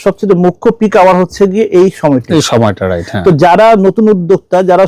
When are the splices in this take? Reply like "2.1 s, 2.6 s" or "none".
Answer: none